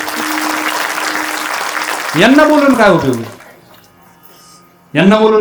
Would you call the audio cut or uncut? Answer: uncut